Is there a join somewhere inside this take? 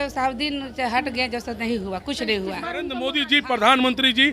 yes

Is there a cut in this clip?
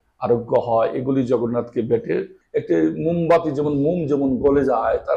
yes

